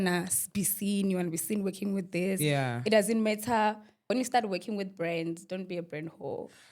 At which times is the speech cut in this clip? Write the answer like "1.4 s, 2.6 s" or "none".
4.1 s